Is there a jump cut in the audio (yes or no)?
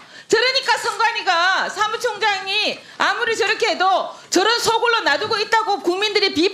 no